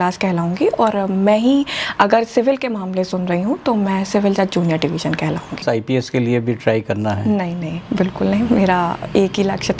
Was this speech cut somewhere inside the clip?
yes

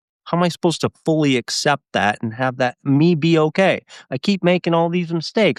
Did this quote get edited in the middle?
no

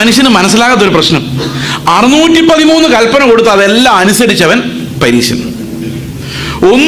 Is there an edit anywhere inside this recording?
no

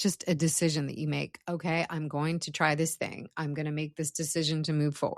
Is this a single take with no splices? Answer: yes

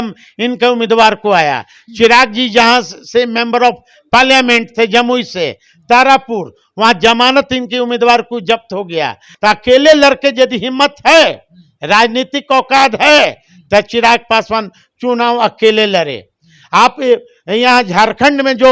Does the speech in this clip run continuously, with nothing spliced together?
no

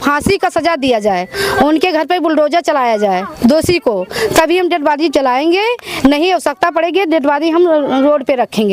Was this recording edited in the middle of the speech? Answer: no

